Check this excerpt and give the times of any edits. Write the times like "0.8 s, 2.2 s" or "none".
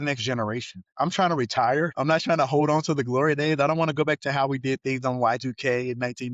0.8 s, 1.9 s